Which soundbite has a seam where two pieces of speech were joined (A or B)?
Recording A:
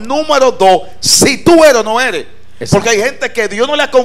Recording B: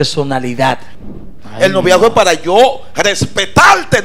B